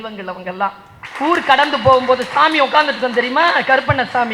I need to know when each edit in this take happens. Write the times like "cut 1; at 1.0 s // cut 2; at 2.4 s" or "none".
cut 1; at 1.0 s